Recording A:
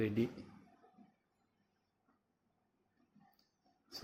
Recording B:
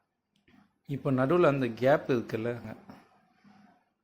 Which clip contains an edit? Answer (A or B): B